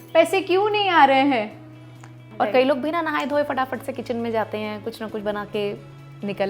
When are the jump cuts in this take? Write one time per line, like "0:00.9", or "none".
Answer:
0:02.2

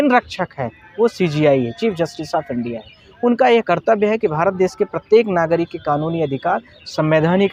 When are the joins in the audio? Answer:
none

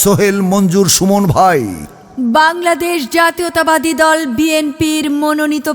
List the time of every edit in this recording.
0:02.1

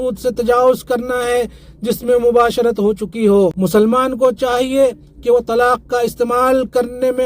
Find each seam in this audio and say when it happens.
0:03.5

